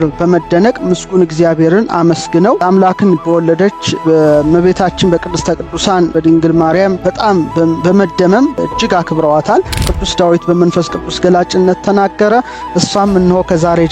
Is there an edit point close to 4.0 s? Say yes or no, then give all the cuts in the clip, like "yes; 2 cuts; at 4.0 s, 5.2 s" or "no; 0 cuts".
yes; 6 cuts; at 2.6 s, 4.0 s, 6.1 s, 7.0 s, 8.6 s, 10.0 s